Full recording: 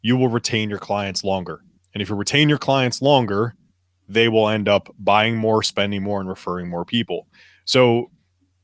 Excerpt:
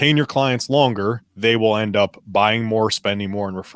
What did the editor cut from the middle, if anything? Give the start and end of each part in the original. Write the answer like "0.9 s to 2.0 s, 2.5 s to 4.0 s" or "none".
3.6 s to 4.0 s